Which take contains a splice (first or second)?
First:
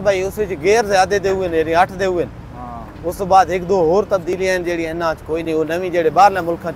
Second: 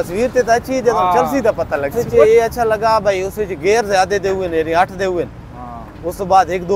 second